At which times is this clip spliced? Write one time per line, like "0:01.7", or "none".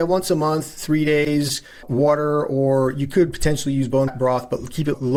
none